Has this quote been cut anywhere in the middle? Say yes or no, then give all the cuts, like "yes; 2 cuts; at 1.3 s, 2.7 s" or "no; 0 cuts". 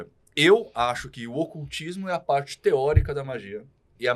no; 0 cuts